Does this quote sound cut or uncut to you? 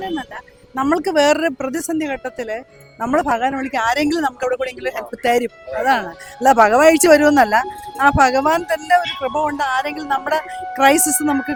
uncut